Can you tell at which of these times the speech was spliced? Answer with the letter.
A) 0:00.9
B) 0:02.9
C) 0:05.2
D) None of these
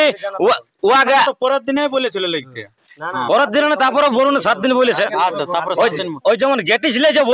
D